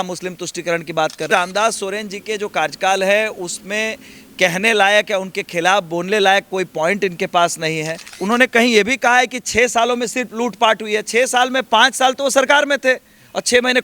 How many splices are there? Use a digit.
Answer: 2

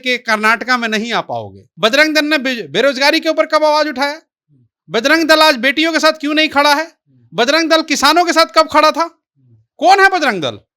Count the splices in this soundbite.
1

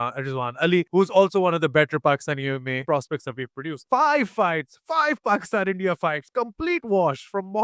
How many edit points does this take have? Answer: 3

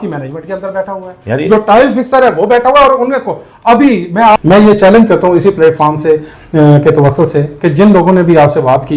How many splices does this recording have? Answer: 1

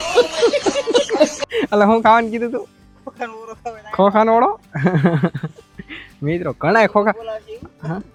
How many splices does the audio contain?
0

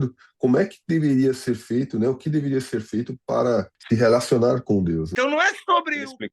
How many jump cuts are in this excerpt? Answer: 2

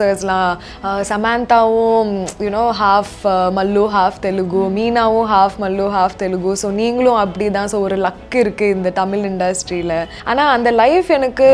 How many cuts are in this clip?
1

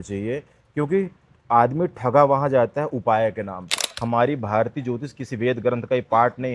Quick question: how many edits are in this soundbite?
1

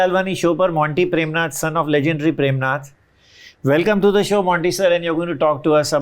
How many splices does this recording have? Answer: 0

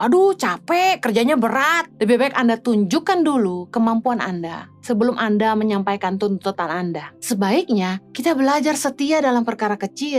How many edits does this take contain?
3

